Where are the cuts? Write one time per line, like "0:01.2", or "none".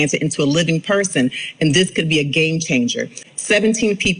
0:03.2